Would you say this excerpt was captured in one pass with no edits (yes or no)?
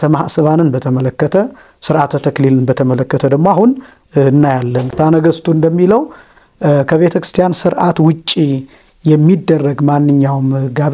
no